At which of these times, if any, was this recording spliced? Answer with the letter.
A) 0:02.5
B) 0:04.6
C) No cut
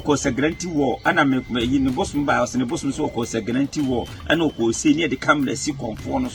C